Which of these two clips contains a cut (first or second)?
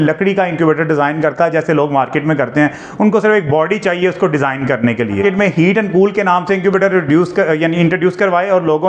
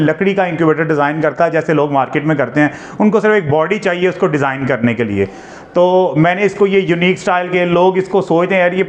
first